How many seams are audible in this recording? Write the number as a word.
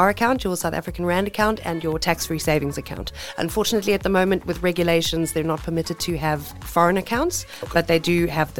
zero